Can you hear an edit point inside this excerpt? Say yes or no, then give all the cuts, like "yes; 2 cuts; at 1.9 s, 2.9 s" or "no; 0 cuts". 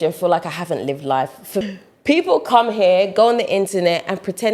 yes; 1 cut; at 1.6 s